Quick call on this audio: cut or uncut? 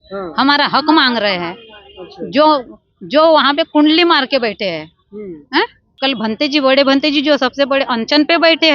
cut